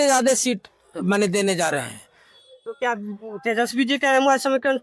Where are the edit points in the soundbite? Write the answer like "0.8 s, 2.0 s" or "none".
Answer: none